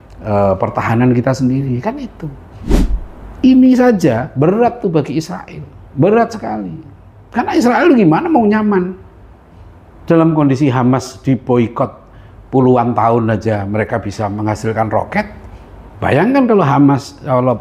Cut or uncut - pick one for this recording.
uncut